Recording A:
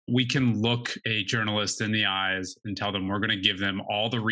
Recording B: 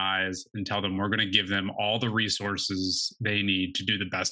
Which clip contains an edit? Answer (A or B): A